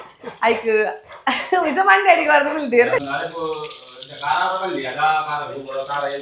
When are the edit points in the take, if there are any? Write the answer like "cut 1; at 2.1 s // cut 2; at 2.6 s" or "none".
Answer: cut 1; at 3.1 s